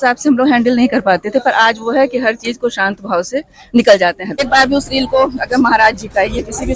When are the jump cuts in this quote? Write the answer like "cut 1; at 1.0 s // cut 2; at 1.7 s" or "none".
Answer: cut 1; at 4.4 s